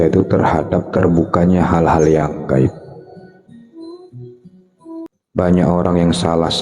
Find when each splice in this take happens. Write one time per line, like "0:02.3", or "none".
0:05.1